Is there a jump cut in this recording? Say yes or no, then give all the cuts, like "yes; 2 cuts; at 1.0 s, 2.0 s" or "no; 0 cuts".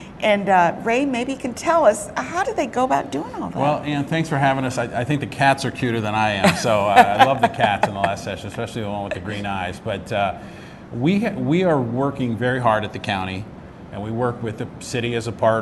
yes; 1 cut; at 11.6 s